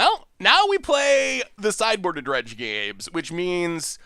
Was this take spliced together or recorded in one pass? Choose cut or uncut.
uncut